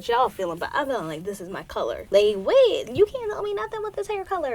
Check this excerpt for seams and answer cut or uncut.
cut